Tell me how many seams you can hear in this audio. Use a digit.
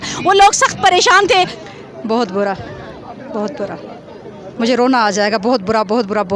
1